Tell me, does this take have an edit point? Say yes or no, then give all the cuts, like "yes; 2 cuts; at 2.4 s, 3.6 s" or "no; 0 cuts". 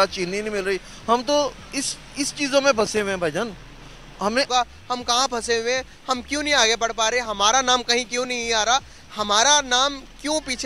yes; 1 cut; at 4.5 s